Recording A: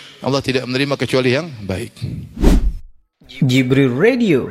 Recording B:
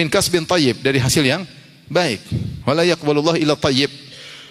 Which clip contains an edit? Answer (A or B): A